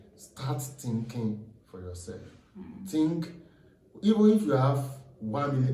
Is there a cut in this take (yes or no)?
no